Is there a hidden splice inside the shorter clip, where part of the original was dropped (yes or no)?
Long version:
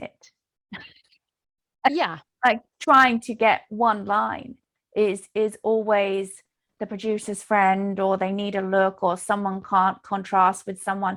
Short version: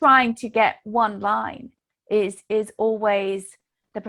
no